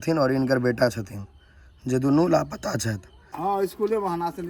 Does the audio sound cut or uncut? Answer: cut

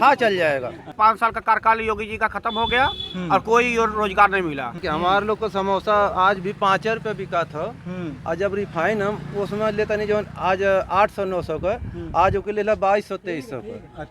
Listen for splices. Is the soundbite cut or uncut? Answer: cut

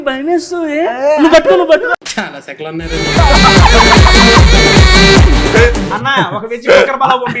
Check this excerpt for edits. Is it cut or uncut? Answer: cut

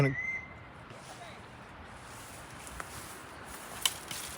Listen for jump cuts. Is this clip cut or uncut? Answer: uncut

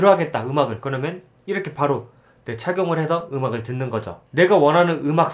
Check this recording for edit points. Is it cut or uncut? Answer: cut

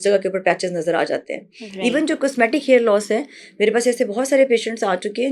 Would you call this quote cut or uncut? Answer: uncut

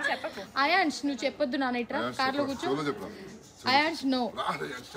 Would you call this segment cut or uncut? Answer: uncut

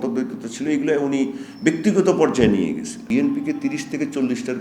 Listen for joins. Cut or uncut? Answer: cut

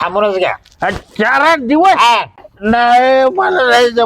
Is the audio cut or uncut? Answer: cut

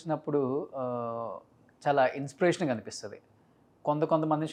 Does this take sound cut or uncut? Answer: uncut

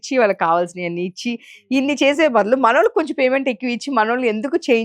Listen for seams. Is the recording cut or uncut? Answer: uncut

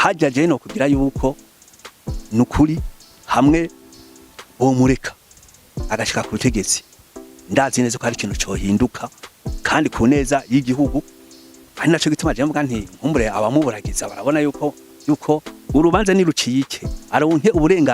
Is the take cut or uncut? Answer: cut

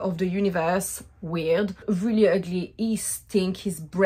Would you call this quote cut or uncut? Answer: cut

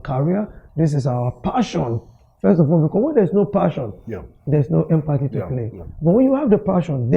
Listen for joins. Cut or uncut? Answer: uncut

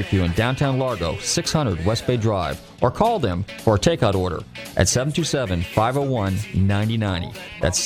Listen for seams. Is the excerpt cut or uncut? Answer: uncut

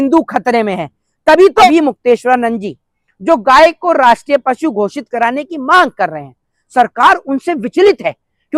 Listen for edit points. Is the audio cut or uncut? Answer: cut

